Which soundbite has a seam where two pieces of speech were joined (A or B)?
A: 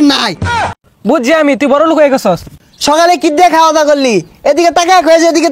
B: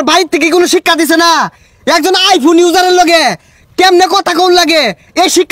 A